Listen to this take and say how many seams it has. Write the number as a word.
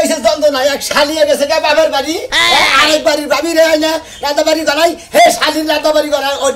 zero